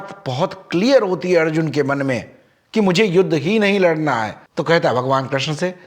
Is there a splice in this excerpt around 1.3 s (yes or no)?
no